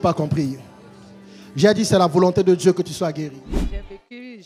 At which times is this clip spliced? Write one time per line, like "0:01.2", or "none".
0:03.5